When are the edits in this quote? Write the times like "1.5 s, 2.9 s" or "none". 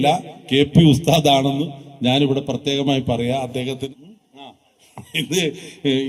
3.9 s